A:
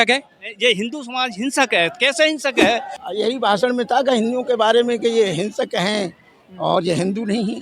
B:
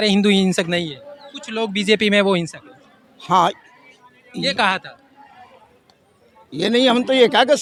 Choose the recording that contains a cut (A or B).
A